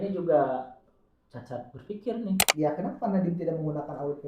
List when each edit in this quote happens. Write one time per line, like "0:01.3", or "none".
0:02.4